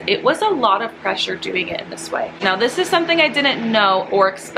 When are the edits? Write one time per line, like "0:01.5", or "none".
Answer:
0:02.3